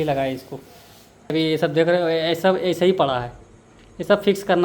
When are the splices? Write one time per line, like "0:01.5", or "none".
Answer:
0:01.3